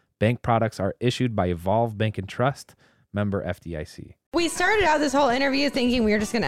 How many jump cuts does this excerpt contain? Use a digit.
1